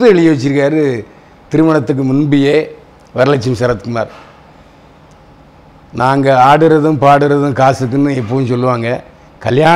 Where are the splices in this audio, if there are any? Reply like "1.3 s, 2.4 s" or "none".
none